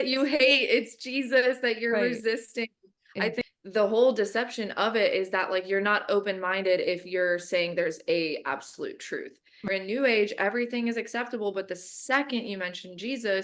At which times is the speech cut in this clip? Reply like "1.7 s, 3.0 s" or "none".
3.4 s, 9.7 s